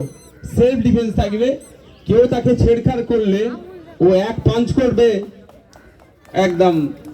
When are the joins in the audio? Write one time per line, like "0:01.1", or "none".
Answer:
none